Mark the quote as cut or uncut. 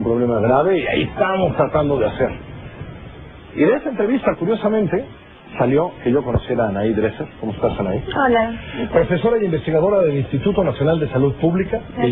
cut